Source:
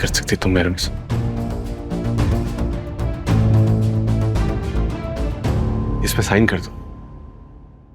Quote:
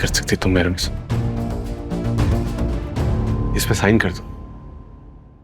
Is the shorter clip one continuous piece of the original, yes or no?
no